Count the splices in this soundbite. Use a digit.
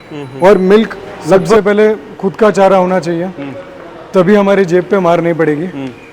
1